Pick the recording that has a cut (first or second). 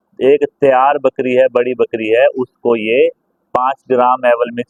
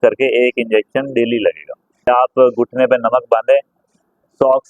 second